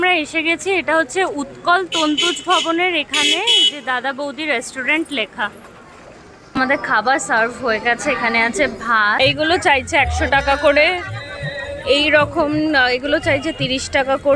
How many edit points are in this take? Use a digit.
2